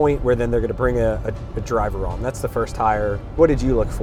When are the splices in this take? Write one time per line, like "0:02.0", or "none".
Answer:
none